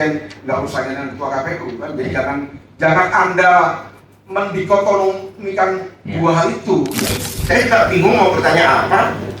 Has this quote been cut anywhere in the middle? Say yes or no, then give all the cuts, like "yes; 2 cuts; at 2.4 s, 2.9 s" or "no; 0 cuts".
yes; 1 cut; at 7.0 s